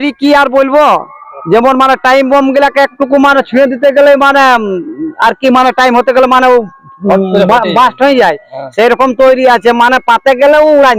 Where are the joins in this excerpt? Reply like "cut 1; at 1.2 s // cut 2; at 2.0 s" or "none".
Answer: none